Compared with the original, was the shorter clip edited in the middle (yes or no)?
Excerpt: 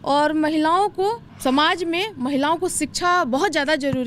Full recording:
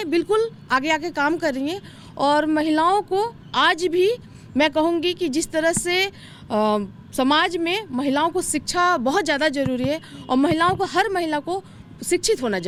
yes